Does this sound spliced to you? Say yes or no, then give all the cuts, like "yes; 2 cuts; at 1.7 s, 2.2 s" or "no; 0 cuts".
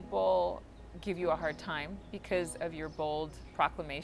no; 0 cuts